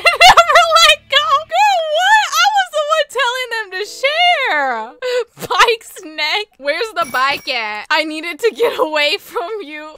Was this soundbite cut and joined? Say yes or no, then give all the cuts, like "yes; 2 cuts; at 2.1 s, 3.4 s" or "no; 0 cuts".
no; 0 cuts